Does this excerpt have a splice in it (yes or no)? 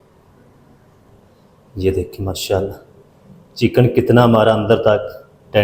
yes